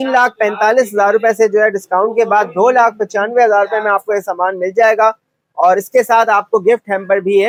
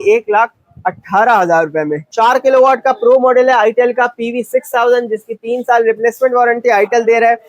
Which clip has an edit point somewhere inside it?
second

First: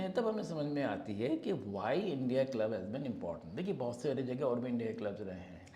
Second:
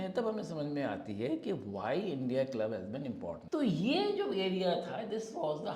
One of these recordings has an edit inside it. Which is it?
second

